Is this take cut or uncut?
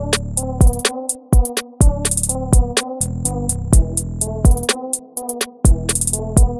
uncut